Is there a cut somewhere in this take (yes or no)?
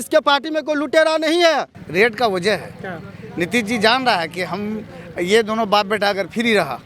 yes